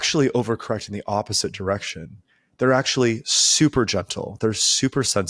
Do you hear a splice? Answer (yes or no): no